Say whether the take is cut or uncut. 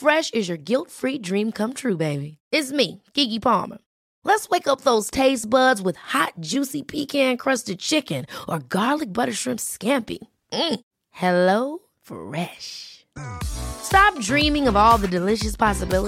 uncut